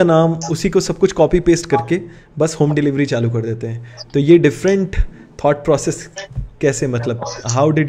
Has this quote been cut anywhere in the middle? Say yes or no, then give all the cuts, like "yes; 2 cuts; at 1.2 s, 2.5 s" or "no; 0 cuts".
no; 0 cuts